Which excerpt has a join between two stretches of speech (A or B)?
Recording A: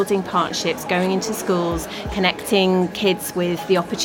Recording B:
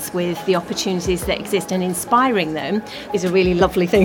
B